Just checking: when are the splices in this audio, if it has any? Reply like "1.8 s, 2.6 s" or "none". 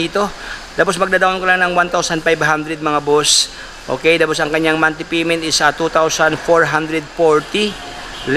none